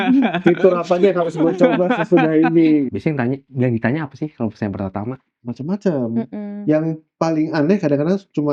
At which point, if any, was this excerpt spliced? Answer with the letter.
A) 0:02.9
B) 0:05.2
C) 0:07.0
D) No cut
A